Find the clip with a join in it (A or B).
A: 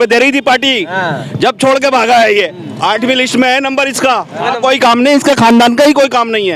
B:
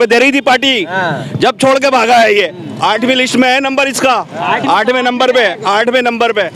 A